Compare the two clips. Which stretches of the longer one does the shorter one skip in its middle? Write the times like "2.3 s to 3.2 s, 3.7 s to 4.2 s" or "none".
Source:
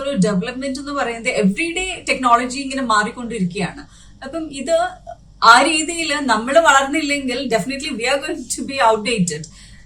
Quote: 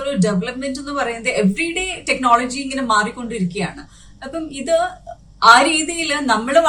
none